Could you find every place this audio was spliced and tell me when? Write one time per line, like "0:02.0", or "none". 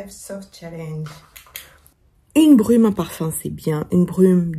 0:01.8